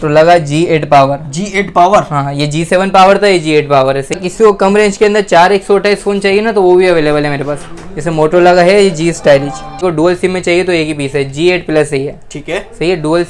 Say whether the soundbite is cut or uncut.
cut